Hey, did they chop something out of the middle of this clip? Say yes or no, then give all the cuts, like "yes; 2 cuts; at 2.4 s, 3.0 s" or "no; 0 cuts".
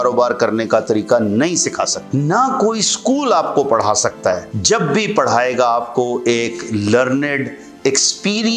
yes; 2 cuts; at 2.0 s, 4.5 s